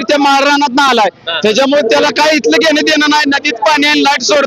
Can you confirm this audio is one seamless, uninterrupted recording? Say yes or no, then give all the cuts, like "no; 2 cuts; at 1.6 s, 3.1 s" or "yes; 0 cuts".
yes; 0 cuts